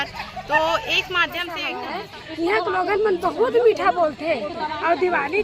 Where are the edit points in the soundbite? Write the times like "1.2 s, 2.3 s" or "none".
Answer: 1.6 s